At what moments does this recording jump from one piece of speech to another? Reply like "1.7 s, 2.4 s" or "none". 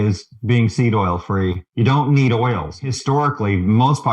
1.6 s, 2.7 s